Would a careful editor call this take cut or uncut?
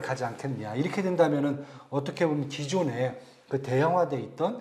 uncut